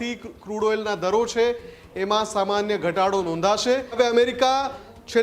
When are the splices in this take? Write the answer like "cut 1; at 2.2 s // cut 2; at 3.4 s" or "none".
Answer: cut 1; at 3.9 s